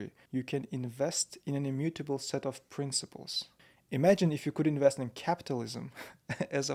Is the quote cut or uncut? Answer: uncut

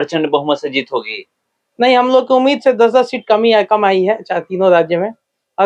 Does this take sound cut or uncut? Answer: uncut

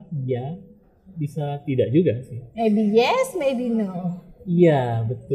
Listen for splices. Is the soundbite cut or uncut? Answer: uncut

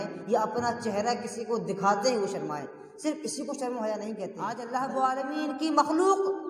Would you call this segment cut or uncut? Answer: cut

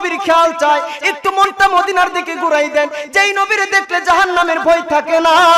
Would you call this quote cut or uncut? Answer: uncut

